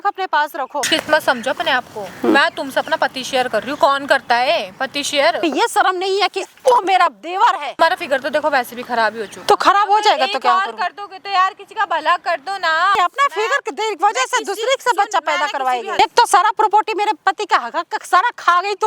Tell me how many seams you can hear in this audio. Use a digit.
5